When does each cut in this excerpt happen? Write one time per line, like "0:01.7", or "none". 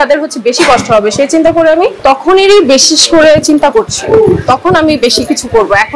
0:01.9